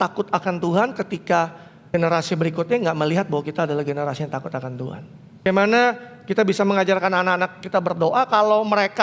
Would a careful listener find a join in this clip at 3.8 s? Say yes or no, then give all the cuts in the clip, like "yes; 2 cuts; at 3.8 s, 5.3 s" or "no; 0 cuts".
no; 2 cuts; at 1.7 s, 5.5 s